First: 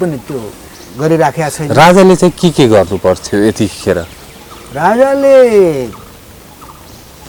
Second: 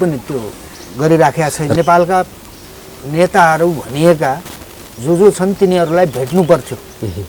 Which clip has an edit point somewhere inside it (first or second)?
second